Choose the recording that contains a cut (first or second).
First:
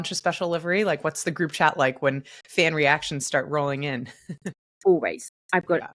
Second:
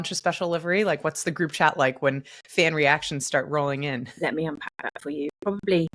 second